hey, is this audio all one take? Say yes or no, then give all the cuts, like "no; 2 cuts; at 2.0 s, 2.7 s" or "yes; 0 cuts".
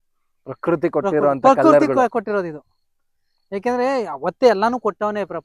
yes; 0 cuts